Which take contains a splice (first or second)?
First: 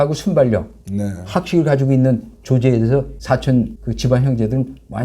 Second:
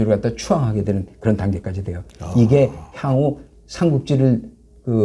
first